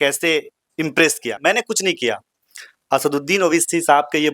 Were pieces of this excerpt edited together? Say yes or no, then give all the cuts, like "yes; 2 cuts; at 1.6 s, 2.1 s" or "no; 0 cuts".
yes; 1 cut; at 1.3 s